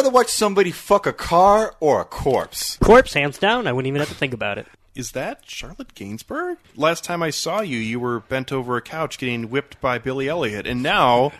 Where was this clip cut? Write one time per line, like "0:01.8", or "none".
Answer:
0:02.7
0:04.7

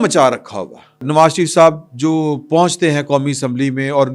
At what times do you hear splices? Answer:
0:01.0

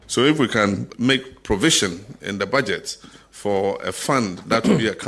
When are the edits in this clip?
0:00.9

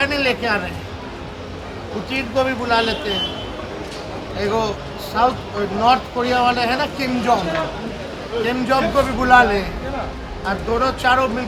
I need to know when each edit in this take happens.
none

